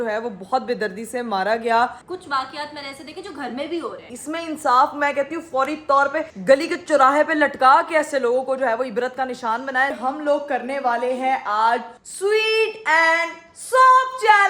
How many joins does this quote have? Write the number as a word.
three